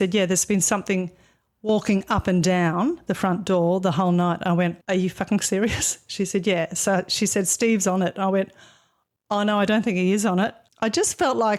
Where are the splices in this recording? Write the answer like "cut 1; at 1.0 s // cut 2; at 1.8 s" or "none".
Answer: none

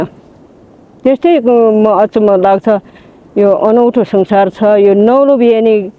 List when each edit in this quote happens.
none

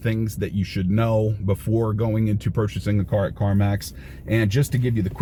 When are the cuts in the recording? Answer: none

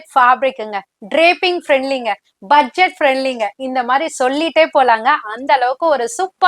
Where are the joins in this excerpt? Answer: none

